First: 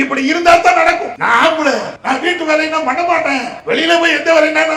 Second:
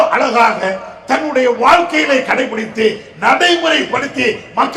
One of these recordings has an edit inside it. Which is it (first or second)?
first